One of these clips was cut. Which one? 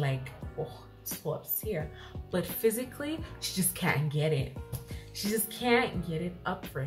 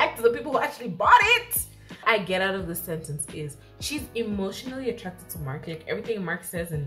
second; 1 cut; at 2.0 s

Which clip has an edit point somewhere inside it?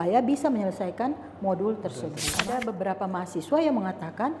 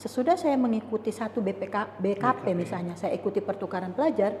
first; 1 cut; at 2.4 s

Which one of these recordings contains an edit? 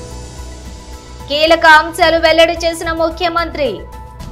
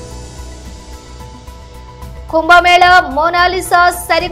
first; 1 cut; at 1.2 s

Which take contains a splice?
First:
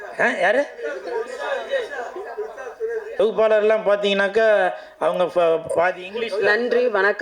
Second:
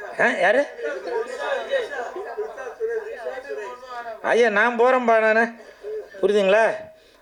first; 1 cut; at 3.1 s

